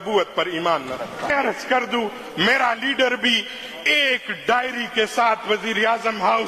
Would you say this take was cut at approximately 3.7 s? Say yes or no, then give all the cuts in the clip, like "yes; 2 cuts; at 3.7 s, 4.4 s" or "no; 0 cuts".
no; 1 cut; at 1.3 s